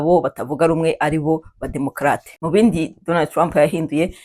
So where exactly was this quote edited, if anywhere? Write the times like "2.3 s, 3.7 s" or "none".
2.3 s